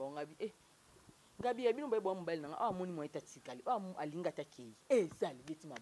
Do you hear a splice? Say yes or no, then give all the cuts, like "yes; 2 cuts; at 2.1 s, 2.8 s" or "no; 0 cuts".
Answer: no; 0 cuts